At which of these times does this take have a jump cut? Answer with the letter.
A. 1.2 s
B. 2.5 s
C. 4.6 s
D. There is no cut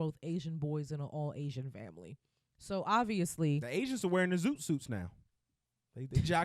D